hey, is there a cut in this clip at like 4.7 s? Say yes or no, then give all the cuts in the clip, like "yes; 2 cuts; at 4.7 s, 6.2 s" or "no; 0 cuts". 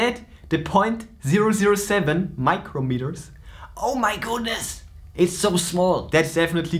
no; 0 cuts